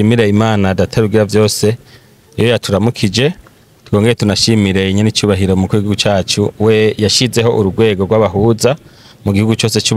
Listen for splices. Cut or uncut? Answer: uncut